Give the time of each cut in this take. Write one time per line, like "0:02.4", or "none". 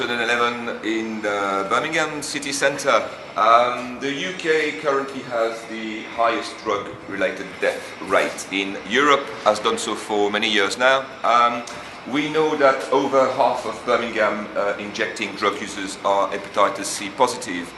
0:03.6